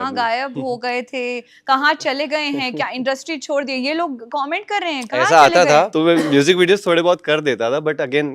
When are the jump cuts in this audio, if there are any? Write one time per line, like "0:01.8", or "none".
0:05.9